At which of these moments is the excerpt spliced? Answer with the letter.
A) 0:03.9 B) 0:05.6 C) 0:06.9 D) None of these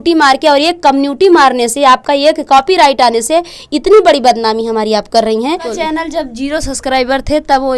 B